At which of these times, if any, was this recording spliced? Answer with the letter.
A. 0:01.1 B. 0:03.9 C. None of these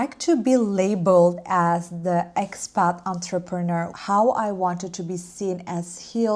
B